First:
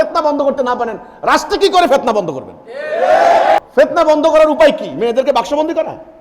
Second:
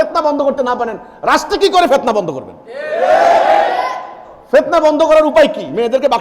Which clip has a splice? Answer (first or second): first